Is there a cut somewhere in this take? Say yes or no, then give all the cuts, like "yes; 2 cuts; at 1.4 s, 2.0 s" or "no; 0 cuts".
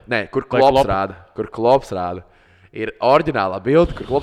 no; 0 cuts